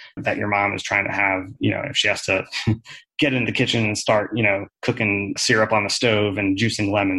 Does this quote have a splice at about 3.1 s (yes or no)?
no